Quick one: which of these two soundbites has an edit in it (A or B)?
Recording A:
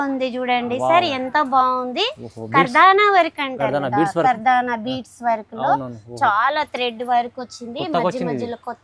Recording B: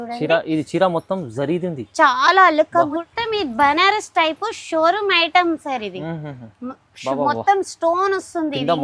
B